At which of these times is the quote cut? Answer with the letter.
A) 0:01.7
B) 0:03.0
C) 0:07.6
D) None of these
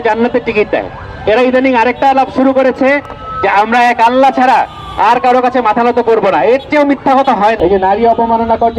C